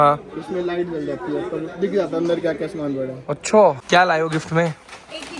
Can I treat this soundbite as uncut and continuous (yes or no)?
no